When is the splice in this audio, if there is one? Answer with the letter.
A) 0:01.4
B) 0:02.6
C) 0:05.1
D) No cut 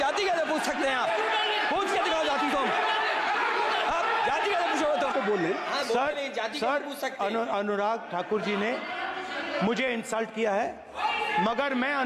C